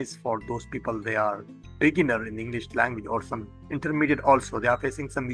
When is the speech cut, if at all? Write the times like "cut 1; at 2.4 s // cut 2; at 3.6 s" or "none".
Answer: none